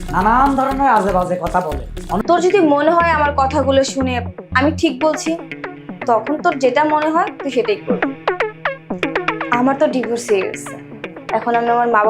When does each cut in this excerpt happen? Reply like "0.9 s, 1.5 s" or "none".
2.2 s